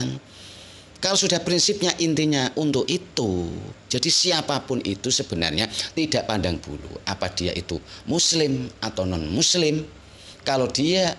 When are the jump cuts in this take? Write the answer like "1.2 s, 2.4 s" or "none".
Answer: none